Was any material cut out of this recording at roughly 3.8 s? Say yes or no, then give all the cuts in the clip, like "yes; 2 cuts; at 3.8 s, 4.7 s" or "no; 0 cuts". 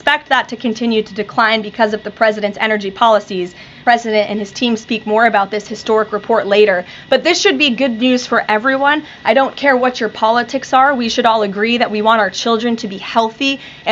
yes; 1 cut; at 3.8 s